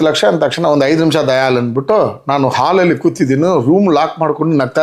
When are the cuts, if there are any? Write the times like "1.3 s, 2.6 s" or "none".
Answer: none